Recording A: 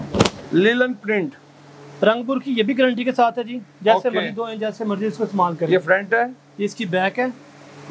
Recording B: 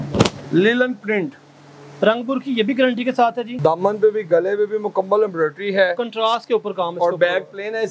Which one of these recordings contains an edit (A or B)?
B